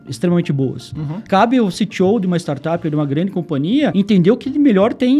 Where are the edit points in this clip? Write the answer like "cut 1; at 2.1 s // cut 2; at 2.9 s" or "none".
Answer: cut 1; at 1.2 s // cut 2; at 3.9 s

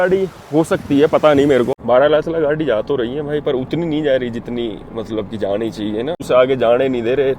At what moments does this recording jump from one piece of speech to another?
cut 1; at 1.8 s // cut 2; at 6.2 s

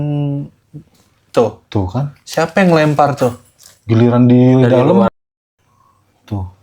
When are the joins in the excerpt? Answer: cut 1; at 5.1 s

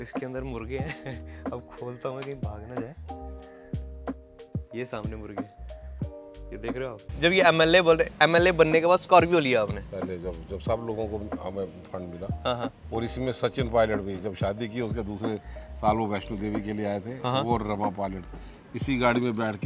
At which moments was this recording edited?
cut 1; at 7.1 s

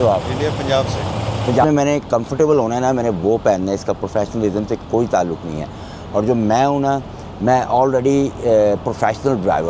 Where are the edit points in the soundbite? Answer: cut 1; at 1.6 s

